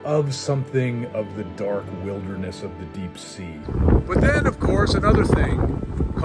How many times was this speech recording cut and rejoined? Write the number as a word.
one